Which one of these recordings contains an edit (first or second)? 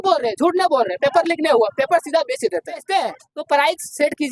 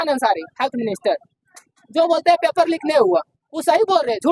first